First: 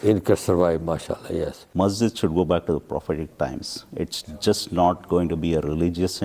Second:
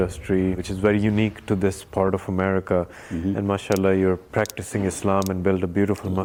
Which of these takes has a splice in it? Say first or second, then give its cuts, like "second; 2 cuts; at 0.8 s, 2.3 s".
first; 1 cut; at 1.7 s